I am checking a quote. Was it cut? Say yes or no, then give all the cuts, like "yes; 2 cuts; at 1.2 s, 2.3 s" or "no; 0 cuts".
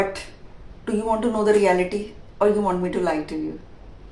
no; 0 cuts